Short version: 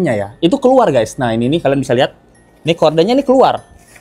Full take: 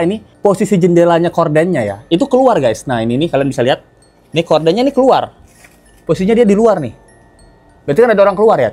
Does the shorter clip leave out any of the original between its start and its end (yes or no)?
no